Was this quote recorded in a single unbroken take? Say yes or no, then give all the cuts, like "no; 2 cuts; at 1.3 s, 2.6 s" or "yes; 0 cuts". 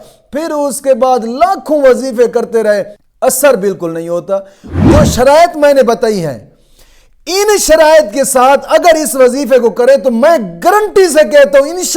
no; 2 cuts; at 3.0 s, 4.8 s